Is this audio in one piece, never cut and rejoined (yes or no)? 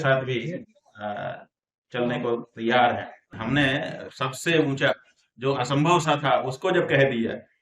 no